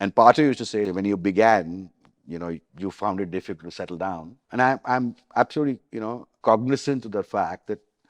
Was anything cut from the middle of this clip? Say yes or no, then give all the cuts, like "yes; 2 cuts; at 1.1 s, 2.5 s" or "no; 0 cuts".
yes; 4 cuts; at 0.9 s, 2.7 s, 4.3 s, 6.3 s